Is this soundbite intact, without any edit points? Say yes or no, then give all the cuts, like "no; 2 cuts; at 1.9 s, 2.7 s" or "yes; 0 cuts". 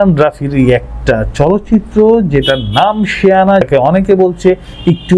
no; 1 cut; at 3.6 s